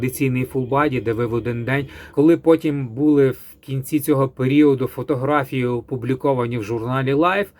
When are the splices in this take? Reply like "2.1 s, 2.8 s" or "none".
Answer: 2.0 s

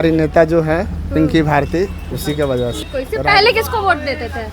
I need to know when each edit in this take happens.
2.8 s

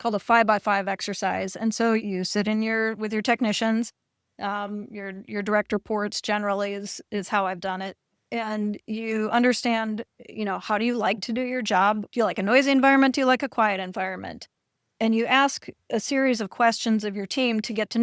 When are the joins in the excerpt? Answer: 2.0 s, 8.1 s, 12.1 s

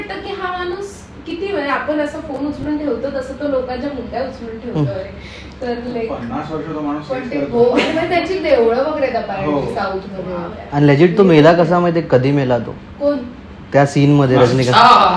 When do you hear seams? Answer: none

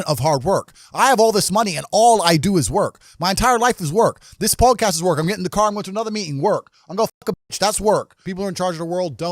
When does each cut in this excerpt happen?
8.2 s

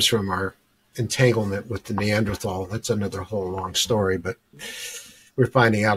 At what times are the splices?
none

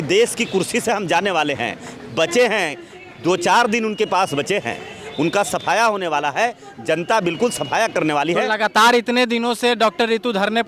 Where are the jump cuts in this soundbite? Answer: none

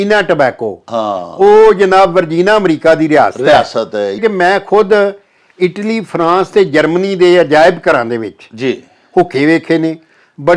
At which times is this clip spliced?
4.2 s

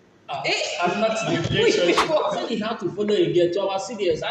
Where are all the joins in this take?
2.7 s

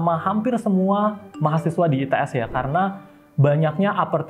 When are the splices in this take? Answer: none

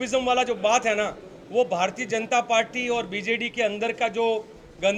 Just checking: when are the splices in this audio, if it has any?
none

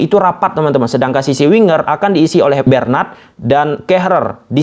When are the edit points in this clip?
2.6 s

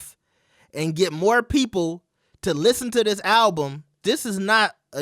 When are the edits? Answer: 4.0 s

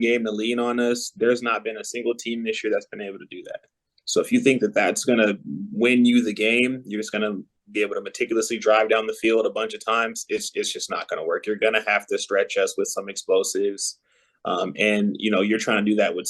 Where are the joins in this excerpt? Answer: none

